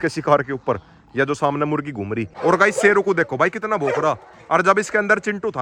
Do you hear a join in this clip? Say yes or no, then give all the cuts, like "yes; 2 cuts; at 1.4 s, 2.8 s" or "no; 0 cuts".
yes; 1 cut; at 2.2 s